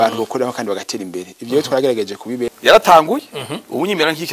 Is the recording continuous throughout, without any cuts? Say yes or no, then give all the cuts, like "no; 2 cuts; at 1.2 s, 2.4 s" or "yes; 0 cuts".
no; 1 cut; at 2.5 s